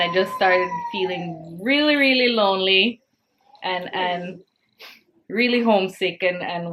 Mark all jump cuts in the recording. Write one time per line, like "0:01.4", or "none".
none